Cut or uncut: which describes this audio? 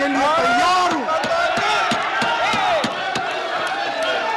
uncut